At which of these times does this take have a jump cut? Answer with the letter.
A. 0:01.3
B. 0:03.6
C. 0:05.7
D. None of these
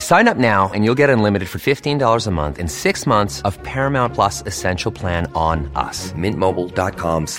D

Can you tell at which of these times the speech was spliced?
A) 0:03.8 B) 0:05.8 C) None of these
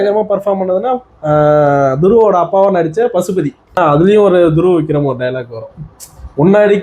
A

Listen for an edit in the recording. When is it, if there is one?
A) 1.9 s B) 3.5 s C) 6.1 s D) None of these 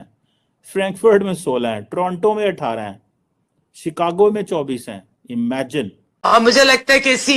C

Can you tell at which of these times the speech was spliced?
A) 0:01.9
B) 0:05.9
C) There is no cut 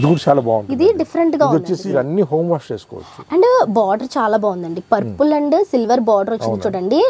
A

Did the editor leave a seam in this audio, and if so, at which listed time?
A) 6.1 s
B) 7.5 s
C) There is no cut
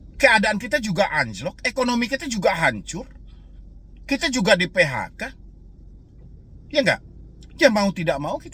C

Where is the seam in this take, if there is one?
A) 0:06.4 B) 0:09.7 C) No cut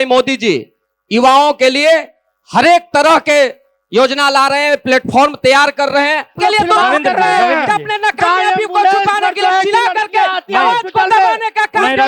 A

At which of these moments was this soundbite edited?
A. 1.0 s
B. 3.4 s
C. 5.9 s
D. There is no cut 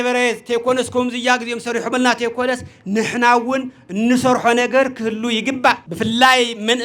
C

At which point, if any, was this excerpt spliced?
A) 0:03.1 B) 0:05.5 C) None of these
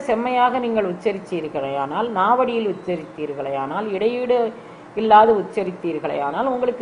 C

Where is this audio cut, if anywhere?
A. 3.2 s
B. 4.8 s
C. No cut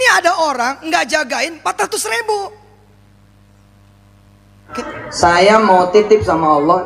B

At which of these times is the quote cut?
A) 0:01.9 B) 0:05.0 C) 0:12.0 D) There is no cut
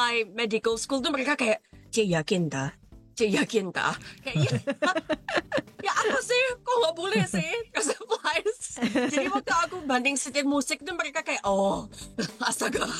C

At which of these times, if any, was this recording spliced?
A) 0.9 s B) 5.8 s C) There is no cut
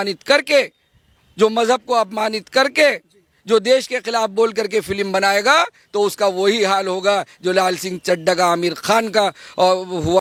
C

